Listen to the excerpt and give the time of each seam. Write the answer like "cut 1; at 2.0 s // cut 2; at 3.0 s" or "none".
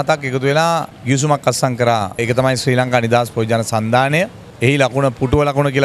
cut 1; at 0.9 s // cut 2; at 2.2 s // cut 3; at 4.4 s